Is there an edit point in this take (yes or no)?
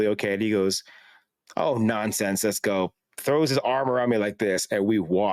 no